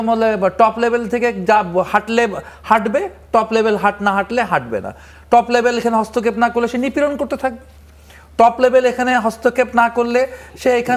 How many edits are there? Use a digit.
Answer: 0